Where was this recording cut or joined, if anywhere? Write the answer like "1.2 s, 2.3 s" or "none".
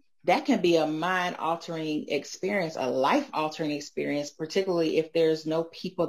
none